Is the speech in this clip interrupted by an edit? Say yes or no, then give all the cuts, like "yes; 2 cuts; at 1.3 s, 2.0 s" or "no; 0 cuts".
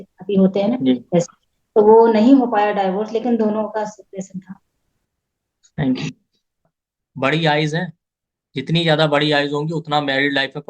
yes; 1 cut; at 6.6 s